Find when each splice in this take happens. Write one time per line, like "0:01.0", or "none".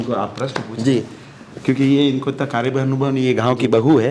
none